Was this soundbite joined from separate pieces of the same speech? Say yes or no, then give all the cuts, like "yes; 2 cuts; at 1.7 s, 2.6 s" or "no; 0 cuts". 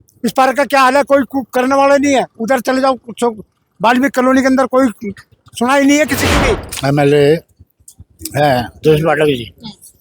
yes; 1 cut; at 6.7 s